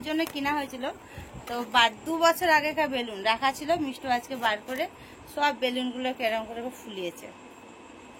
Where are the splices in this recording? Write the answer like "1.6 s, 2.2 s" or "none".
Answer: none